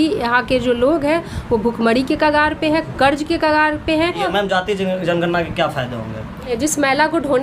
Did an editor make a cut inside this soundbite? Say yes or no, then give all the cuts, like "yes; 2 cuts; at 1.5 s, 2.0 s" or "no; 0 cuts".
yes; 2 cuts; at 4.2 s, 6.5 s